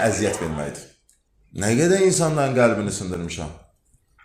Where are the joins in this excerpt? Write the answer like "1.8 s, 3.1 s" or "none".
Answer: 1.6 s